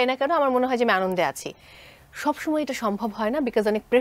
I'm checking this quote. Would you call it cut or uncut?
uncut